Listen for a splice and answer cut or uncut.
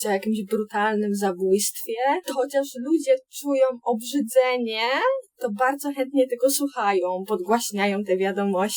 uncut